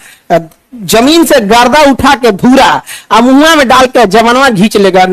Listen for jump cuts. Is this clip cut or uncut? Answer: uncut